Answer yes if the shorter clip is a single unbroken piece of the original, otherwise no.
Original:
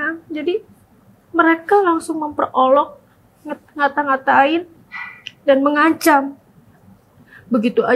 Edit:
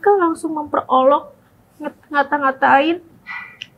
yes